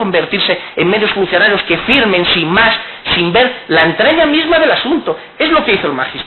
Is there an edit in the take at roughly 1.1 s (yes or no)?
no